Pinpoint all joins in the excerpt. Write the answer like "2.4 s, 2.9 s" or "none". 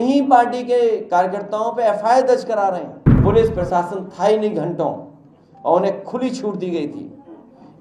3.2 s